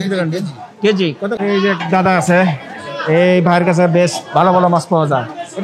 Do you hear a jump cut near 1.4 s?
yes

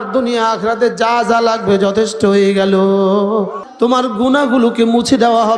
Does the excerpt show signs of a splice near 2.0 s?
no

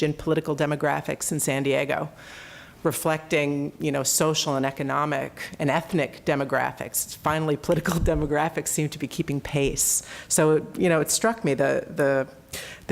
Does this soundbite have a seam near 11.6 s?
yes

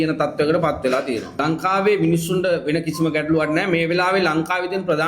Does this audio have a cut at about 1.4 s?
yes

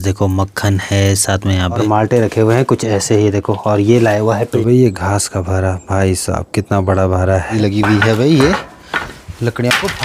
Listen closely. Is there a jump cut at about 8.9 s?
no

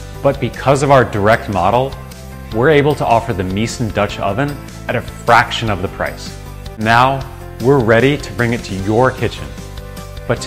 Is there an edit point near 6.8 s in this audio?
yes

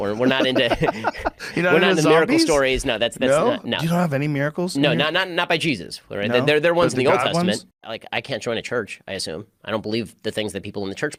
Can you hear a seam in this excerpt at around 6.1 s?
no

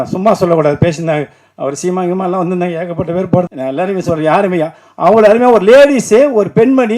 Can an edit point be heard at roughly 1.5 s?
no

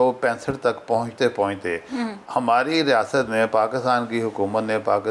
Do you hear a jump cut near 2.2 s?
yes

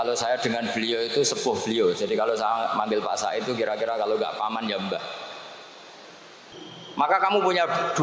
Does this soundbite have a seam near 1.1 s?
no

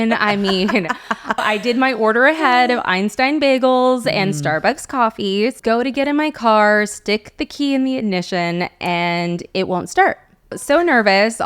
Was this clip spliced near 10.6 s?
yes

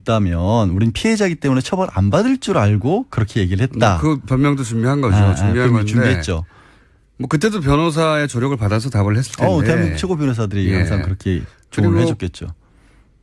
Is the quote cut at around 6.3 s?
no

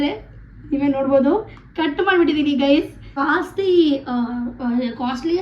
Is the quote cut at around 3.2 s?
yes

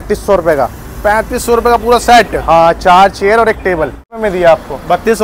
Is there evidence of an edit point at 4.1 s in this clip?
yes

